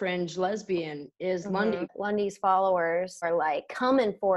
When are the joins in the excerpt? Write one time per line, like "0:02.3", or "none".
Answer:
0:01.9
0:03.3